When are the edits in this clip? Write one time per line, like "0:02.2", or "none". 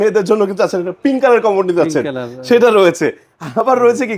none